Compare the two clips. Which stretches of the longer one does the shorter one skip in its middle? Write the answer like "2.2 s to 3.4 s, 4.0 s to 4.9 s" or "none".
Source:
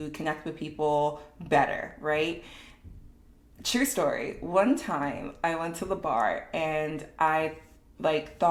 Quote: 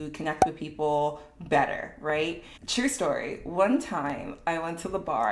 2.5 s to 3.5 s